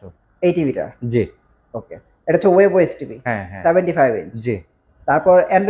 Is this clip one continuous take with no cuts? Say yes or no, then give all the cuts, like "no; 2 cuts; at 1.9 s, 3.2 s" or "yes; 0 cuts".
yes; 0 cuts